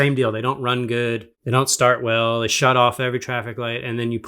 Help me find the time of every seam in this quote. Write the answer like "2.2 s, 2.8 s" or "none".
1.3 s